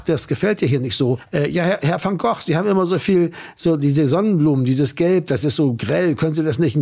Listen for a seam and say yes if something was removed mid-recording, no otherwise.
yes